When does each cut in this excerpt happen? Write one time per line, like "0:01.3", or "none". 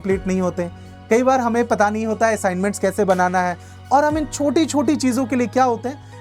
none

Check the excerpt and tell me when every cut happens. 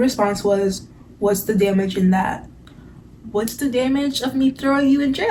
none

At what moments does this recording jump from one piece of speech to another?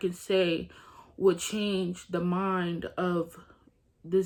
none

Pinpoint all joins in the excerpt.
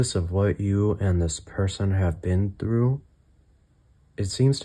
none

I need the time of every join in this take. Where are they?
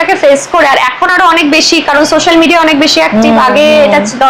none

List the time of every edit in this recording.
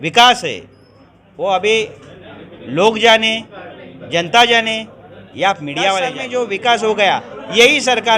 0:06.2

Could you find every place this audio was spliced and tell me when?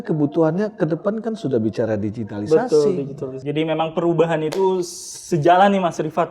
0:03.4

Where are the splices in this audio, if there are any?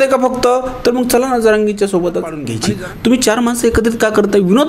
0:02.5

